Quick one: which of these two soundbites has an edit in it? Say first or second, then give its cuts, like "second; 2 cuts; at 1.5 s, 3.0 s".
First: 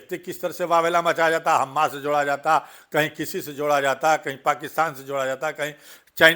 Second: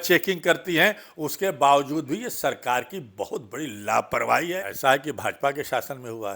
second; 1 cut; at 4.7 s